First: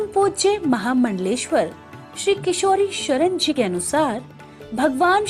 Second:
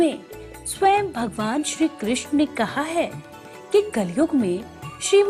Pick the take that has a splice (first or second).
first